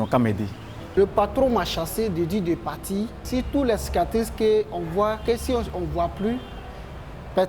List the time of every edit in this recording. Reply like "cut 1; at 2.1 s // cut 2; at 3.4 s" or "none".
cut 1; at 1.0 s // cut 2; at 3.2 s